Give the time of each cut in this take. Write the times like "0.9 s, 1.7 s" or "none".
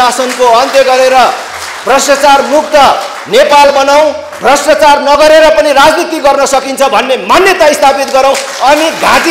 none